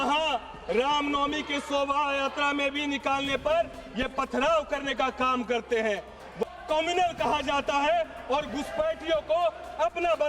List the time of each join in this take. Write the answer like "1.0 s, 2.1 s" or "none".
6.5 s